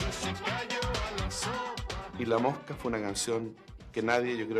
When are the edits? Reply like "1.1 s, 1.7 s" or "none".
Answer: 2.0 s